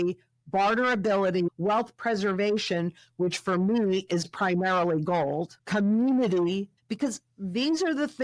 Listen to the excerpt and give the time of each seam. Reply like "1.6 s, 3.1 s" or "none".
1.5 s, 5.6 s, 6.7 s